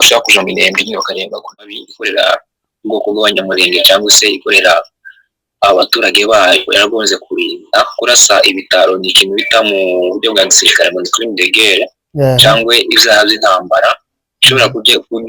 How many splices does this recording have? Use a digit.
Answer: 1